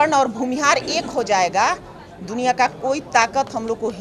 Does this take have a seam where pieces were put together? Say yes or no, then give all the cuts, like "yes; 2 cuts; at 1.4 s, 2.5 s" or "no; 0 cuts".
no; 0 cuts